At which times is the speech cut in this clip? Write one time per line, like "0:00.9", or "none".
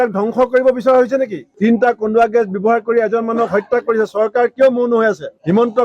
0:01.5

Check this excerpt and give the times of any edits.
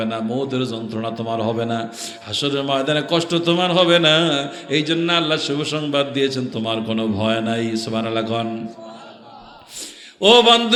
none

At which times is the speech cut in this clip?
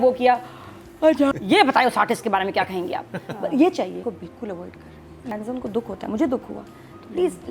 0:01.3
0:04.0
0:05.3

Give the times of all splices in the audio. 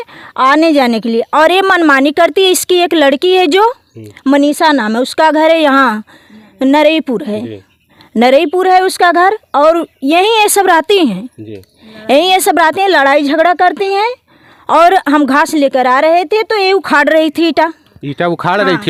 none

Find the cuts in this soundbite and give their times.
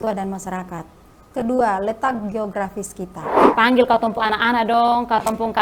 0:03.4

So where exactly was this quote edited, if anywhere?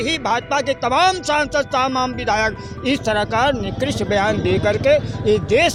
none

